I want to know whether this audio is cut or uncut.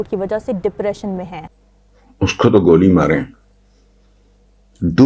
cut